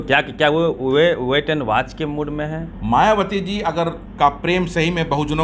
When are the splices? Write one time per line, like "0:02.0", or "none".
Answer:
0:02.7
0:04.0